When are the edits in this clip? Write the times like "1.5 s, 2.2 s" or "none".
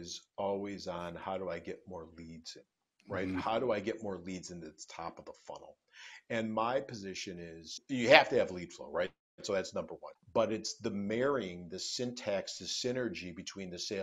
7.8 s, 10.0 s